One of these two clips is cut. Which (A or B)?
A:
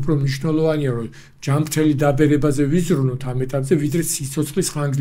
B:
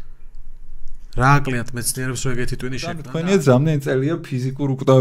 B